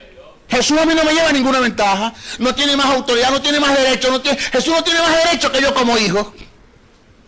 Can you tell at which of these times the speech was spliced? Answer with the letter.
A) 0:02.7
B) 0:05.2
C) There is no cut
A